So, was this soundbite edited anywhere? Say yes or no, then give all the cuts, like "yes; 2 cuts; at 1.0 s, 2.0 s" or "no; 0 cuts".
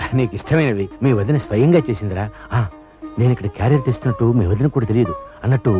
yes; 1 cut; at 0.9 s